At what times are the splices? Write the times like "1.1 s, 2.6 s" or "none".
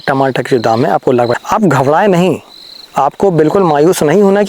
1.4 s

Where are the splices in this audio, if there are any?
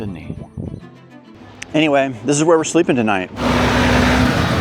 1.0 s, 3.4 s

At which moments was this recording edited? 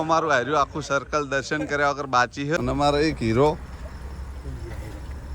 2.6 s

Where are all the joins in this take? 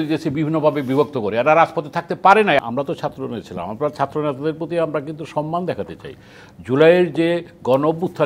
2.6 s, 6.4 s

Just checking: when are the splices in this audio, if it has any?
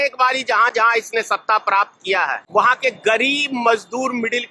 2.4 s

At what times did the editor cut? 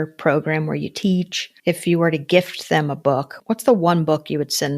1.4 s, 3.3 s

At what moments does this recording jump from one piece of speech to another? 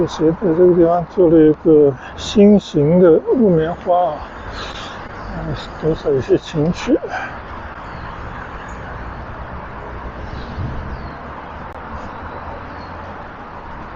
none

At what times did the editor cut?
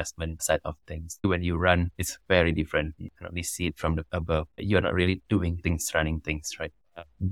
1.2 s, 3.0 s

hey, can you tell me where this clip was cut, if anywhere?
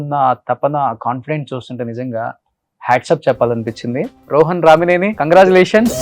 4.2 s, 5.1 s

